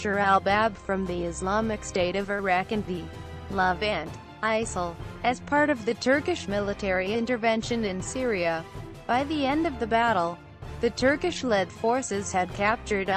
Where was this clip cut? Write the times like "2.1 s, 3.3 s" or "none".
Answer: 9.3 s